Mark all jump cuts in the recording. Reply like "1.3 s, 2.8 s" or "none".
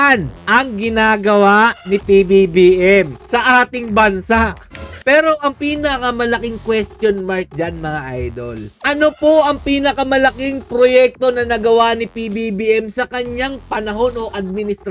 3.2 s, 5.0 s